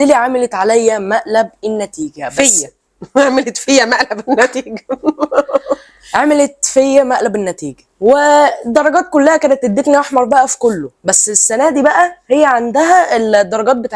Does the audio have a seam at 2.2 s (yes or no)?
no